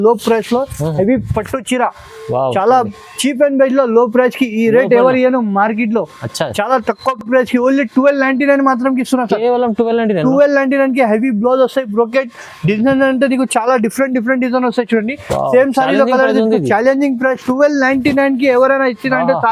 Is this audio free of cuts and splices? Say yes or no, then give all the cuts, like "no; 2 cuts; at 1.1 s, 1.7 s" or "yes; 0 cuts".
yes; 0 cuts